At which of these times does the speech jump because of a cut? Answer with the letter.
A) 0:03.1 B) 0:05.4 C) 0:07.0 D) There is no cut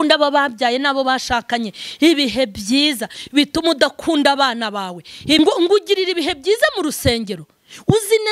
B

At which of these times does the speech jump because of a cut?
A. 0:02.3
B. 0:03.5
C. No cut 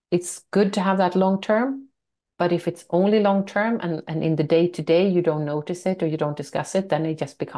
C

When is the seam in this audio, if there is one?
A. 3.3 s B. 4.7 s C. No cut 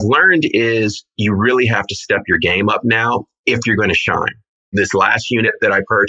B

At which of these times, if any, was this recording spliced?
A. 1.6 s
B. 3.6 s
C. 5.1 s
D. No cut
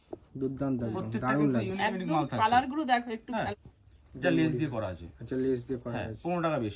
B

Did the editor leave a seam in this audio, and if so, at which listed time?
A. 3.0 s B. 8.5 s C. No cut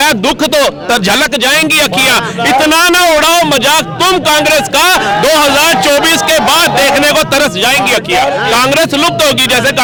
C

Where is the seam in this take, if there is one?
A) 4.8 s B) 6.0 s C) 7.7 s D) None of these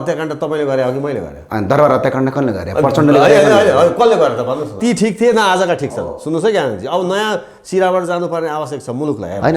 A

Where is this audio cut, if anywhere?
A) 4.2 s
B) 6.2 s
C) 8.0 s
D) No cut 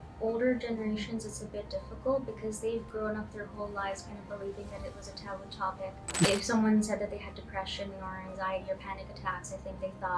B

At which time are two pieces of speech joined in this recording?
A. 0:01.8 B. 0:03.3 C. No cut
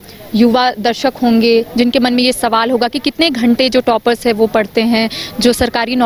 C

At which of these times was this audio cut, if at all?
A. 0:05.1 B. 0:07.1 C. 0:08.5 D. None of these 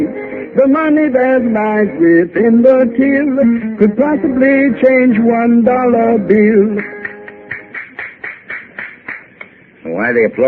A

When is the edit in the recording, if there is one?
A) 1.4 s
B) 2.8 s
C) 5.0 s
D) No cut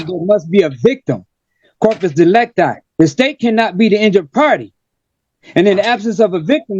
D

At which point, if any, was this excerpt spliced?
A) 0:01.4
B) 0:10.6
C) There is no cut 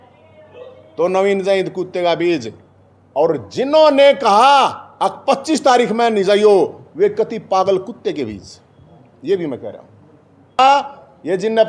B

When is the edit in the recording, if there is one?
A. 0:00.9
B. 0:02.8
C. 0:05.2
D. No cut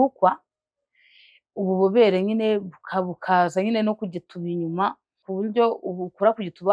C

